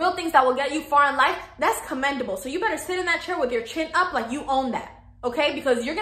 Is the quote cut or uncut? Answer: uncut